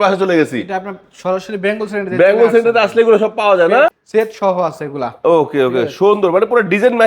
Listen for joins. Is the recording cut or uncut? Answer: cut